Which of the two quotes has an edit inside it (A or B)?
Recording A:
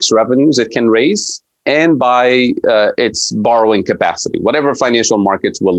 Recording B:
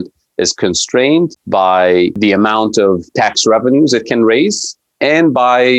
B